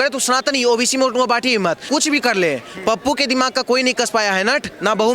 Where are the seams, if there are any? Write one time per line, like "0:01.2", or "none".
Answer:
0:01.8